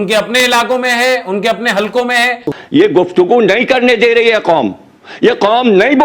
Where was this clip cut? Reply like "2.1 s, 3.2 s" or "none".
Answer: 2.6 s